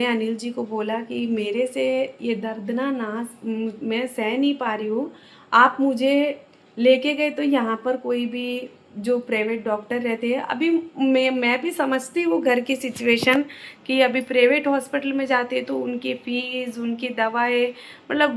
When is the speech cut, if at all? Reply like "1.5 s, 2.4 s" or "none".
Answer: none